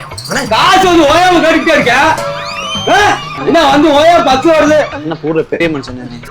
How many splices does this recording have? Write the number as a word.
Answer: one